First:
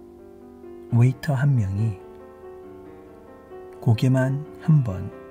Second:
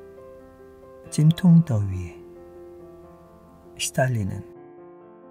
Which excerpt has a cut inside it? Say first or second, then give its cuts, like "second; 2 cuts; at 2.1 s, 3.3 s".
second; 3 cuts; at 0.7 s, 2.2 s, 3.9 s